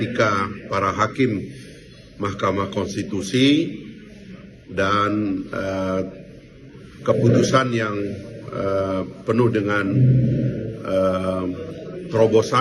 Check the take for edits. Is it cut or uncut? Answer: uncut